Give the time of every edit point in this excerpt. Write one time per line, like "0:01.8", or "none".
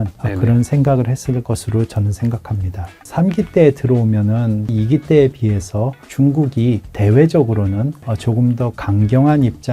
0:01.4
0:03.0
0:04.7
0:08.1